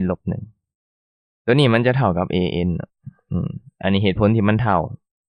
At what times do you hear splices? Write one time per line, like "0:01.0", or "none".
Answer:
none